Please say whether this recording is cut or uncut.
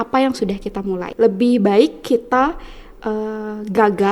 cut